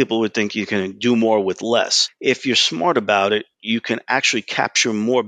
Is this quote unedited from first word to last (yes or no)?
no